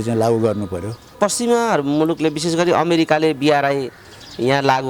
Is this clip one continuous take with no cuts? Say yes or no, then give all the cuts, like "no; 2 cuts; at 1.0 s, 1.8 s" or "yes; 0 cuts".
no; 1 cut; at 1.1 s